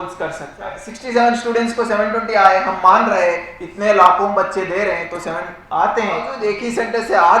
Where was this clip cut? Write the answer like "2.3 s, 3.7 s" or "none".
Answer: 0.9 s, 6.3 s